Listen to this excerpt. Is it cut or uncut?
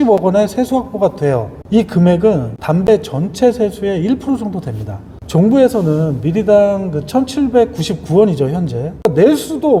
uncut